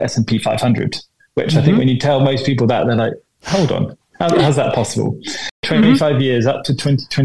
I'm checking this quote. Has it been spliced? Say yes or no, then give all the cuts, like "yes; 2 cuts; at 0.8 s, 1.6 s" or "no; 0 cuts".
no; 0 cuts